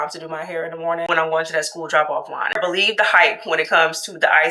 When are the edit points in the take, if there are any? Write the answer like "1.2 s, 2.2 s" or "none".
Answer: 1.1 s, 2.6 s